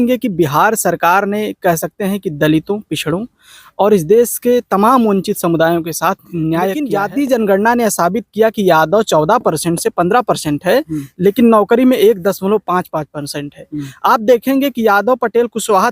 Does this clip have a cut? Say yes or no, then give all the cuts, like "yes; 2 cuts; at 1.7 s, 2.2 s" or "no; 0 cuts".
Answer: yes; 1 cut; at 6.8 s